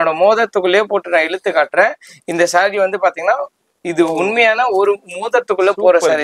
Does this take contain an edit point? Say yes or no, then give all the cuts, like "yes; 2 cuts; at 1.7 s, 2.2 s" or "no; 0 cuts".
no; 0 cuts